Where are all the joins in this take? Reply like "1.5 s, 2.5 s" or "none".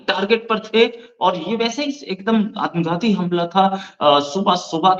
none

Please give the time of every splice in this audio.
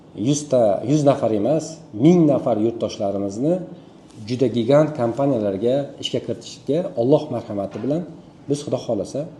none

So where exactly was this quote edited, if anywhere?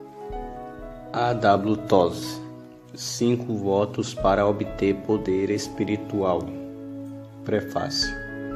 1.1 s

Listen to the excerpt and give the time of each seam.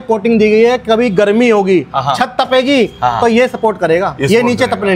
none

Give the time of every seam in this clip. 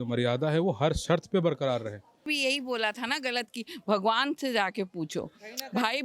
2.3 s

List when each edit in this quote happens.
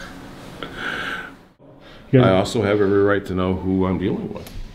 1.8 s

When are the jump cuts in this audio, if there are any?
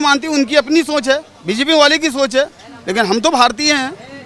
none

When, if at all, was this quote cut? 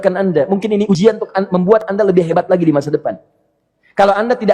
0.9 s

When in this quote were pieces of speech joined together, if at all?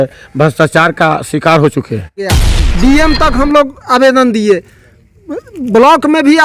2.4 s

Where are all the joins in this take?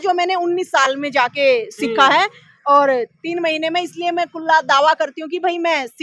none

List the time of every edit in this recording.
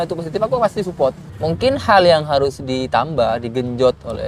1.3 s

